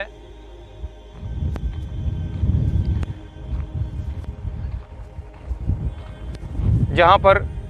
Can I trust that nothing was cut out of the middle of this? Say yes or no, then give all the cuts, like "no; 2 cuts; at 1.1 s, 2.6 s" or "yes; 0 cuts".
yes; 0 cuts